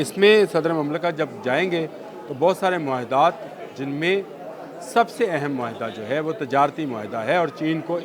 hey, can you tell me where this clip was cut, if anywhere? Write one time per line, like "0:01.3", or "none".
none